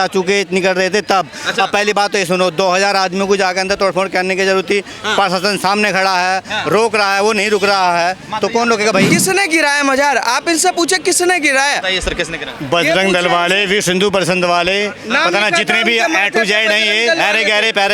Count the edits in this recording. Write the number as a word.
one